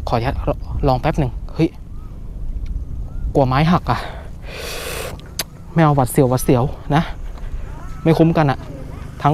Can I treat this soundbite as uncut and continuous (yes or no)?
yes